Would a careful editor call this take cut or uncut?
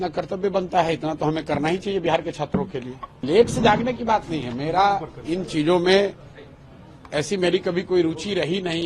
cut